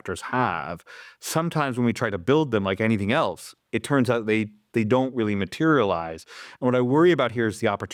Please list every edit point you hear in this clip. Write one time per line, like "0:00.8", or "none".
none